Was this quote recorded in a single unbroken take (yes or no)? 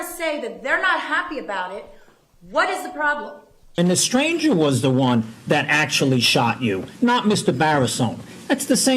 no